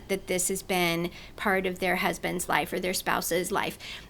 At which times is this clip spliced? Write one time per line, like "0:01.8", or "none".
none

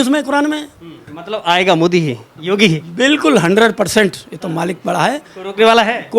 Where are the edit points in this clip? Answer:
0:01.1

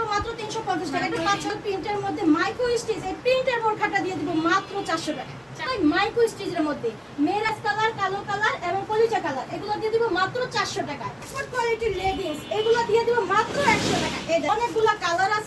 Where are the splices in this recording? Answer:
0:01.5
0:05.7
0:07.5
0:11.3
0:14.5

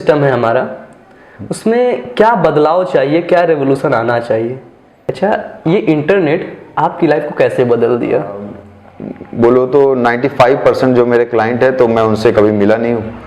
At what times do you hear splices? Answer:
0:05.0
0:08.6

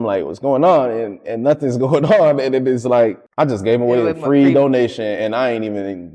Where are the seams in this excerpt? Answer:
0:03.2

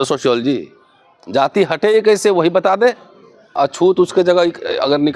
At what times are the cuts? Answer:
0:03.5

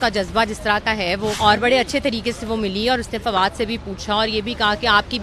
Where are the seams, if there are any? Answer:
0:01.4

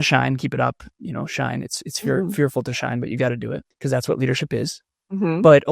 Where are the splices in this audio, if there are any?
0:03.7

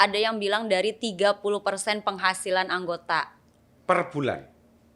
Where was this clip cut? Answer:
none

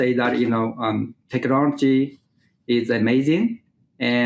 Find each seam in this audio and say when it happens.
none

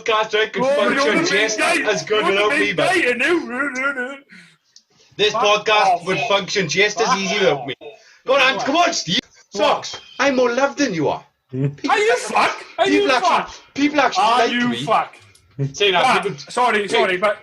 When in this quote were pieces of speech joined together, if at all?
0:09.1

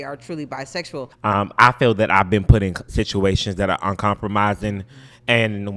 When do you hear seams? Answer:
0:01.1

